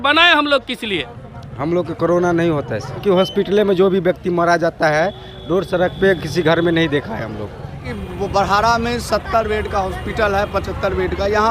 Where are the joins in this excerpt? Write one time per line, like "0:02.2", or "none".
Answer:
0:01.0
0:03.0
0:07.6